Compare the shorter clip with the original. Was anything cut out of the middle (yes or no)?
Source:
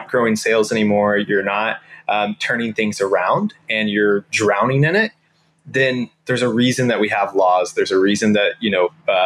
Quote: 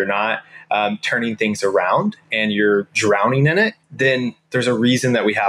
yes